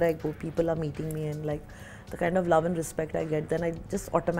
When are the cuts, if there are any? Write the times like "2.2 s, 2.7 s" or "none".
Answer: none